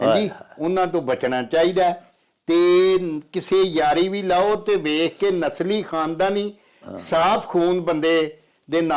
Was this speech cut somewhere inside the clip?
no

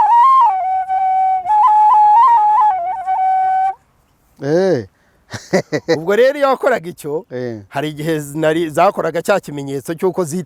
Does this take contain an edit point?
no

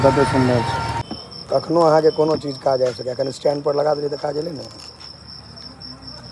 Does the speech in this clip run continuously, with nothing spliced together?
no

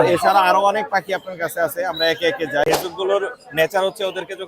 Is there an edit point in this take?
yes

